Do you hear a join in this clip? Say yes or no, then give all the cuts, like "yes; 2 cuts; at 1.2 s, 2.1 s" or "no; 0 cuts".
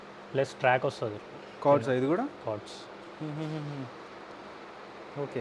no; 0 cuts